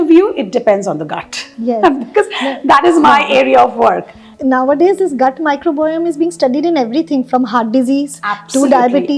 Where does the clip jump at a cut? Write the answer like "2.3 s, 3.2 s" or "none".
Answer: none